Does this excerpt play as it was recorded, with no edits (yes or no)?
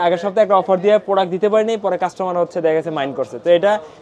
yes